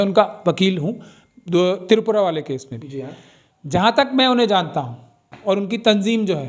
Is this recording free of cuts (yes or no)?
yes